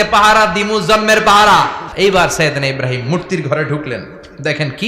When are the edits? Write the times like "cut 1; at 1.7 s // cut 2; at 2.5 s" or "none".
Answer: cut 1; at 1.8 s